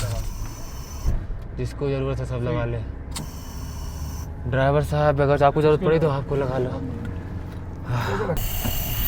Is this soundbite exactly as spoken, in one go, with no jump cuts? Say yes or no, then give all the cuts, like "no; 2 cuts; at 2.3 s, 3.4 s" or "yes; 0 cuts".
yes; 0 cuts